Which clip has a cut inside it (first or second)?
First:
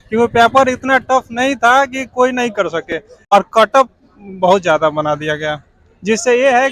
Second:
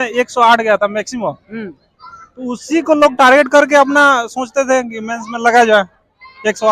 first